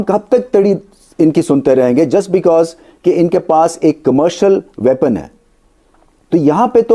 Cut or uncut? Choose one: cut